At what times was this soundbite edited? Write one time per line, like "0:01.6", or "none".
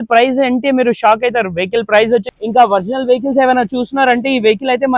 0:02.3